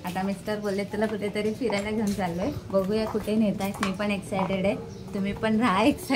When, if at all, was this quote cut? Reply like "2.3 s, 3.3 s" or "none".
none